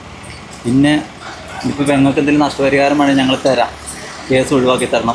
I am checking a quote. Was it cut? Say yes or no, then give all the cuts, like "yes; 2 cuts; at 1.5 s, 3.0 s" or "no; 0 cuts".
no; 0 cuts